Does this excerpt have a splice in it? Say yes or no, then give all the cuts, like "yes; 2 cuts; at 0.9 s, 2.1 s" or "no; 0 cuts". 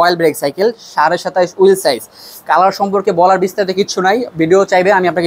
no; 0 cuts